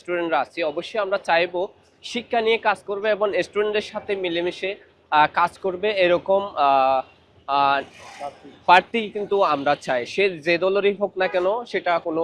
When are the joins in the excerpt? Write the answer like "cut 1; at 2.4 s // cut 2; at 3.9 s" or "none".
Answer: none

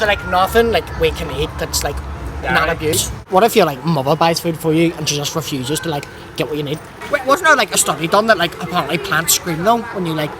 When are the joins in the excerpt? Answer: cut 1; at 3.2 s // cut 2; at 6.9 s

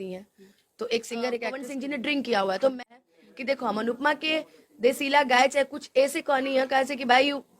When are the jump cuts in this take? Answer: cut 1; at 1.6 s // cut 2; at 2.8 s

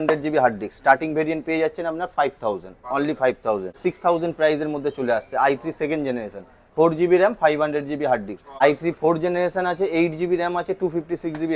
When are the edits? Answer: cut 1; at 3.8 s // cut 2; at 8.6 s

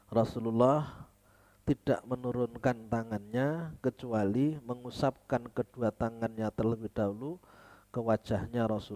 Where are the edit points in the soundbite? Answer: none

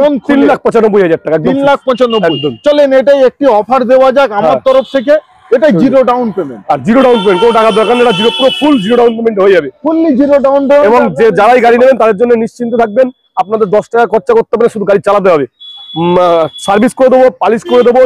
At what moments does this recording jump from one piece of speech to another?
none

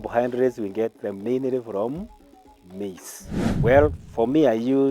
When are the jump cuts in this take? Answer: cut 1; at 3.4 s

